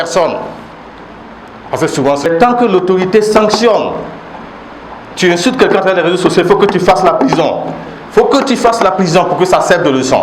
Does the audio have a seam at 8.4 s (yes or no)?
no